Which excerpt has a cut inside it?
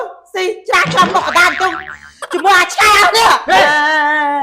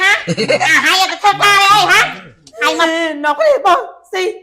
second; 1 cut; at 2.8 s

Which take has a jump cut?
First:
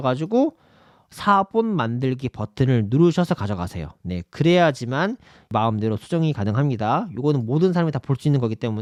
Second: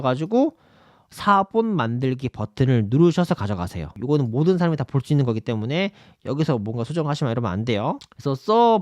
second; 1 cut; at 4.0 s

